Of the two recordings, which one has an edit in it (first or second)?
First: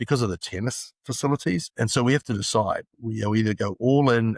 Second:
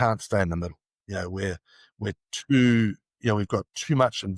first